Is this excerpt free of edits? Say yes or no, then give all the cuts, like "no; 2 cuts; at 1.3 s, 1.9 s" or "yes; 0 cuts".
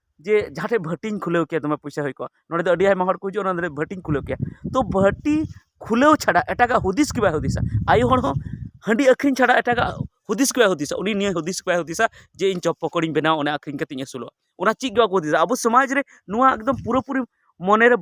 yes; 0 cuts